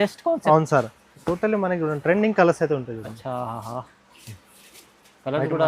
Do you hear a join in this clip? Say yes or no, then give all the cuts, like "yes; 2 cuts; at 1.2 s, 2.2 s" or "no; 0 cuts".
yes; 1 cut; at 1.0 s